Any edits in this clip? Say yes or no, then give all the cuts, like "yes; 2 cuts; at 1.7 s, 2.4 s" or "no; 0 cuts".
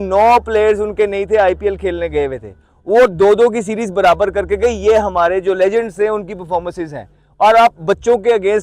no; 0 cuts